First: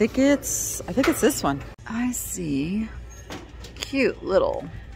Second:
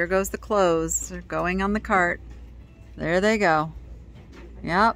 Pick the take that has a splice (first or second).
first